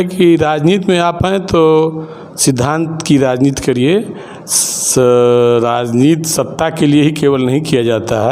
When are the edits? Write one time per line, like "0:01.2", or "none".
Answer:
none